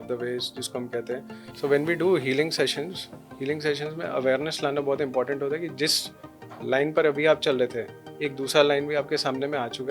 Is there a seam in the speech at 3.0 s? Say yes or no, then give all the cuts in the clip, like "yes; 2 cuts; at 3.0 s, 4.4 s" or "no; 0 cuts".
no; 1 cut; at 1.4 s